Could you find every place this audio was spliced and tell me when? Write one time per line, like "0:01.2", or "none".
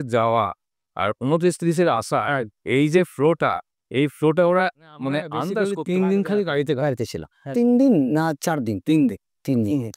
0:05.6